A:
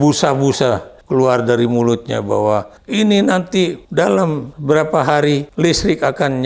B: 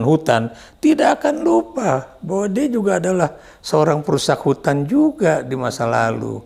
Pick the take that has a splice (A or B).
A